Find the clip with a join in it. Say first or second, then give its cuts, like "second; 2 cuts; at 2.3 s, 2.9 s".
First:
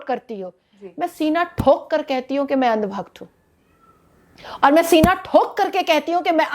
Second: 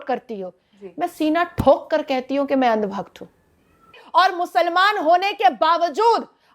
second; 1 cut; at 4.0 s